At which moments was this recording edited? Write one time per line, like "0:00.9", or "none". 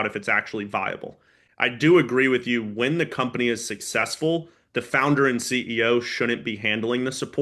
0:01.4